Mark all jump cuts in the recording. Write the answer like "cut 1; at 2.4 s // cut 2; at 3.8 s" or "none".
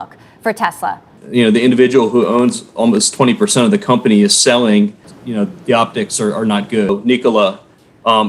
cut 1; at 1.2 s // cut 2; at 5.0 s // cut 3; at 6.9 s